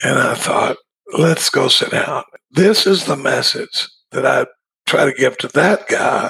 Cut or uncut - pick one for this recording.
cut